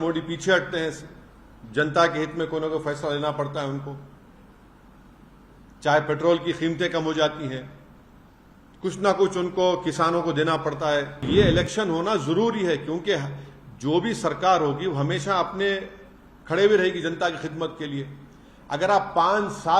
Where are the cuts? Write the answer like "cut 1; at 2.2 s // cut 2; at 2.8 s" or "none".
cut 1; at 11.2 s